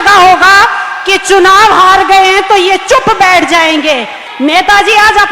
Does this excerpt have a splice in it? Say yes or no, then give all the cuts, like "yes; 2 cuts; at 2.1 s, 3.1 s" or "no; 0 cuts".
yes; 1 cut; at 4.2 s